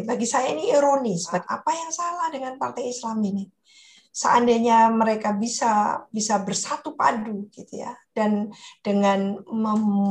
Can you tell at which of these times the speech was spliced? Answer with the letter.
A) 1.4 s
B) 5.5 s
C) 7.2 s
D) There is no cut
A